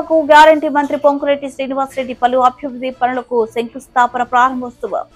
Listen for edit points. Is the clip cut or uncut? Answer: uncut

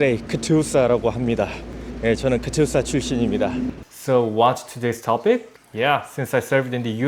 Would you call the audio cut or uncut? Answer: cut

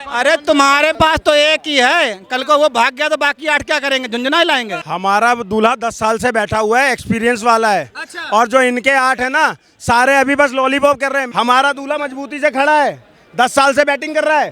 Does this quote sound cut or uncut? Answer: cut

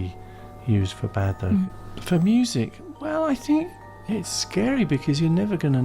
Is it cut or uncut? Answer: cut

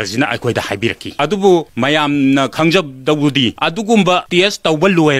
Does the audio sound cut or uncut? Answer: cut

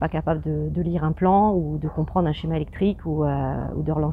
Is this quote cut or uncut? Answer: uncut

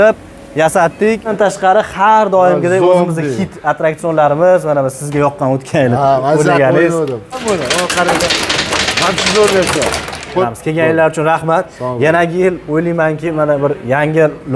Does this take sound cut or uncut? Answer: cut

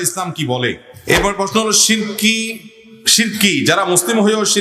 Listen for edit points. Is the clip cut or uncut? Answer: cut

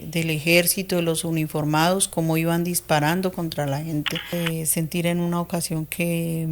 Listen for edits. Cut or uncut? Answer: cut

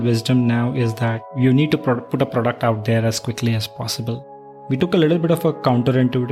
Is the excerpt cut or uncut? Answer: cut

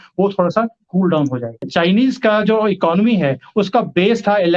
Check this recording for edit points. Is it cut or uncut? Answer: cut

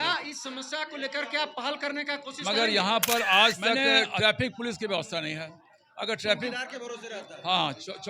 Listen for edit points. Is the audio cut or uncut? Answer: cut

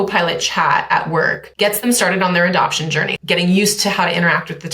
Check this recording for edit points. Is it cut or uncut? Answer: cut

